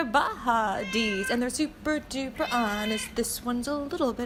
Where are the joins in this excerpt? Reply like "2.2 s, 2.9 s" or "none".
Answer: none